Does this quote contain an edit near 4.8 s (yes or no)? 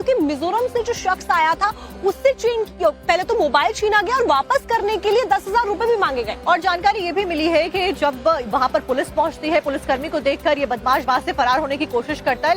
no